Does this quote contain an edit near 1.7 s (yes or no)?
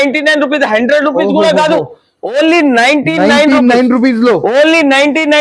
no